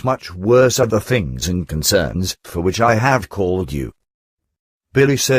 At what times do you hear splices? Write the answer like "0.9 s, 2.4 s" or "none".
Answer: 3.7 s

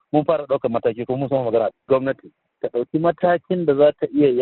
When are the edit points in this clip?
2.1 s

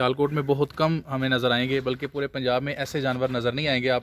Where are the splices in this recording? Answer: none

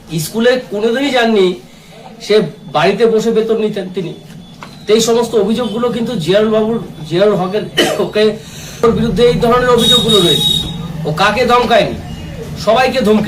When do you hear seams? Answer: 8.8 s

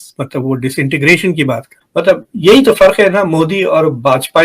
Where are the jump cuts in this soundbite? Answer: 1.8 s

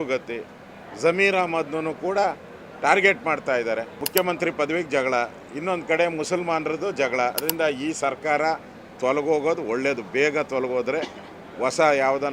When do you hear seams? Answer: 3.9 s, 7.4 s

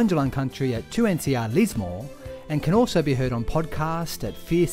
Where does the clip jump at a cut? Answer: none

